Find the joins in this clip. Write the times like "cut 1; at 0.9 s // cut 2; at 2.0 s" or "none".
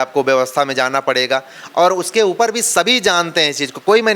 none